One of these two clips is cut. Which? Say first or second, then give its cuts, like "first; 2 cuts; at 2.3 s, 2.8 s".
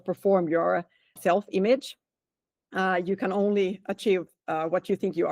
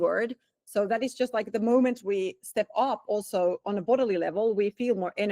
first; 1 cut; at 1.1 s